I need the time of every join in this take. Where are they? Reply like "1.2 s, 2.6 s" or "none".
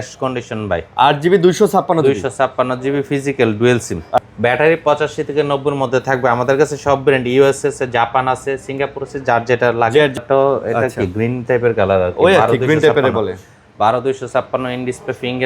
4.2 s, 10.2 s